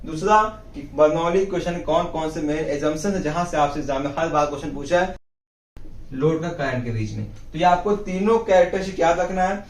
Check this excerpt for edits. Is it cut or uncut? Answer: cut